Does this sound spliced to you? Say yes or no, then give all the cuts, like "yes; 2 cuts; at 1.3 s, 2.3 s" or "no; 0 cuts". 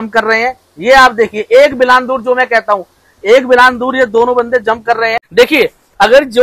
yes; 1 cut; at 5.2 s